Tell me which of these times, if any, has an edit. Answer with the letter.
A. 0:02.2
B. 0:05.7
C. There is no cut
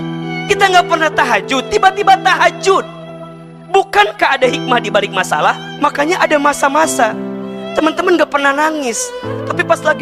B